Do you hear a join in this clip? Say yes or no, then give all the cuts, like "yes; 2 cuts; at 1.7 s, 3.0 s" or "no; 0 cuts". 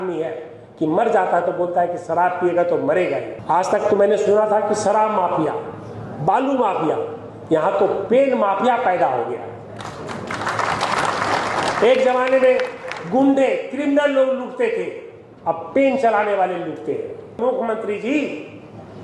yes; 2 cuts; at 3.3 s, 17.4 s